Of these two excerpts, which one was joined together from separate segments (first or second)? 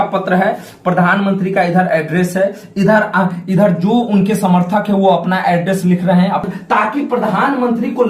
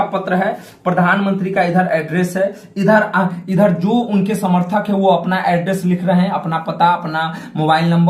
first